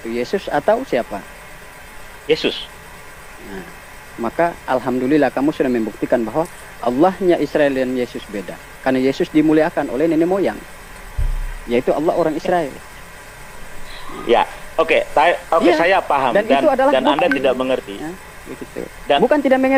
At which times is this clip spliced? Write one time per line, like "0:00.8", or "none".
none